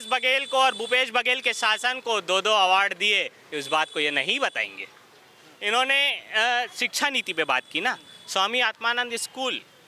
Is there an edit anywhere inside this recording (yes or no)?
no